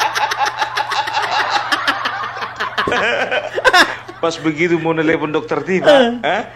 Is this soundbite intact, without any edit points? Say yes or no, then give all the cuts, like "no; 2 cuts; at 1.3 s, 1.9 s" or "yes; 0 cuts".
yes; 0 cuts